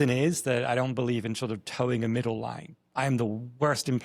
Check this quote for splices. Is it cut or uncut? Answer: uncut